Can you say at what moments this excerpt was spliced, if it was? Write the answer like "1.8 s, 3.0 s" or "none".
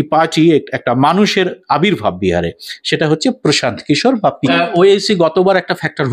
4.5 s